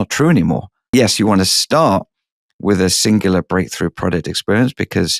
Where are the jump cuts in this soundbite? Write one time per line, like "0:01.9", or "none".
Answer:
0:00.9